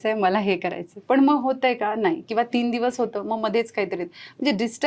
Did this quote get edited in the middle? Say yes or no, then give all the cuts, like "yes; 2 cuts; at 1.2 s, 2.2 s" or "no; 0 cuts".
no; 0 cuts